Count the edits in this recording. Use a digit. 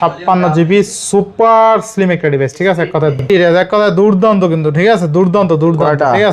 1